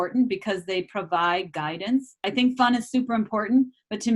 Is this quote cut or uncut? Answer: cut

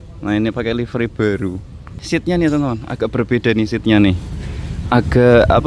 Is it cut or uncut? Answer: cut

